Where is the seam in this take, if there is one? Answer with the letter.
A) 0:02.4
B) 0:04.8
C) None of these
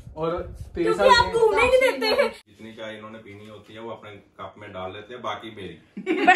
A